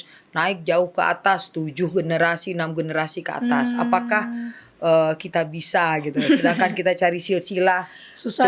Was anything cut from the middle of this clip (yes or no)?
no